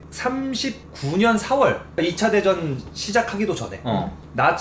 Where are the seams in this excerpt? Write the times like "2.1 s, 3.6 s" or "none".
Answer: 2.0 s